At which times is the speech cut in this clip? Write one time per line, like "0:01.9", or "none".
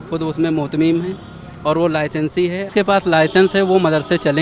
0:02.7